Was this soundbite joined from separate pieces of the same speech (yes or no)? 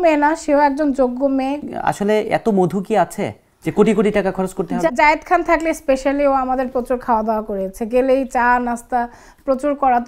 yes